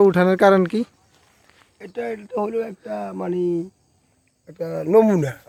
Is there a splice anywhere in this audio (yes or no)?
no